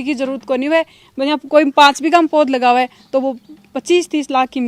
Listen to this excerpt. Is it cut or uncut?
uncut